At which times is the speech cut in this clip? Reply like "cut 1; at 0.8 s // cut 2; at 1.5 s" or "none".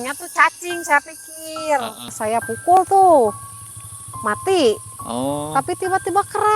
cut 1; at 2.2 s